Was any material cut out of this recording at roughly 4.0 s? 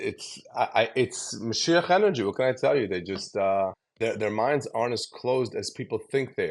yes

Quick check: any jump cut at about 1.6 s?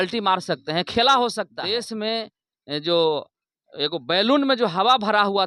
yes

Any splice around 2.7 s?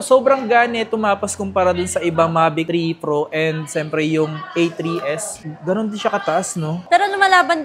no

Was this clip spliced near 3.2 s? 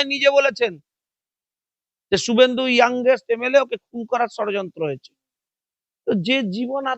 no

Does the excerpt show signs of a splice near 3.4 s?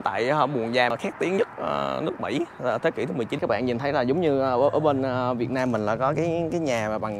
yes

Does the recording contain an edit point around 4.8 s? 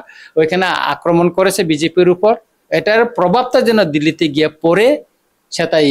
no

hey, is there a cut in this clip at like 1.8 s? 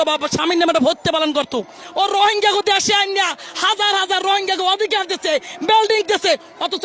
yes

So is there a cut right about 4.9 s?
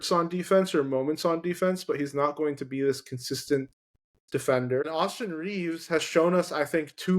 yes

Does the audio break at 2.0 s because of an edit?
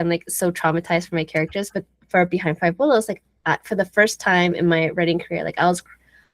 no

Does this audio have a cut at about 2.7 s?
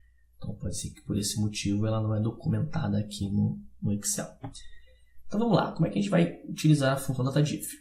yes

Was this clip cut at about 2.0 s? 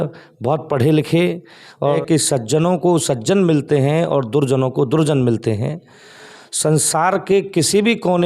yes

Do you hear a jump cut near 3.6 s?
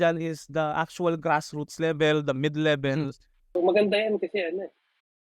yes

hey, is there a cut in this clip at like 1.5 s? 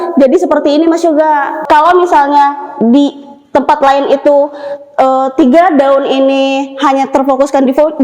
yes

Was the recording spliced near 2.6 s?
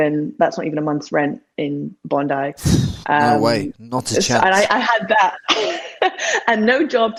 no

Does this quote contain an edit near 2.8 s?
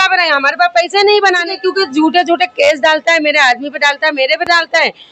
no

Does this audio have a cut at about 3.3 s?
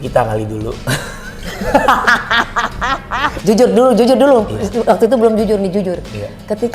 yes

